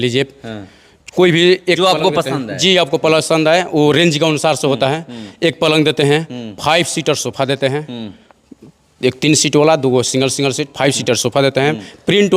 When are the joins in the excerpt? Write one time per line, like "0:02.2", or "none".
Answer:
none